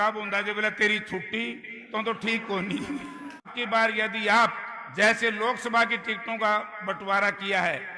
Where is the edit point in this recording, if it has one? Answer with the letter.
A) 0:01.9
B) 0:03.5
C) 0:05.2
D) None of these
B